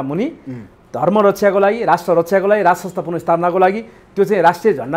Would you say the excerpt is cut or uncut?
uncut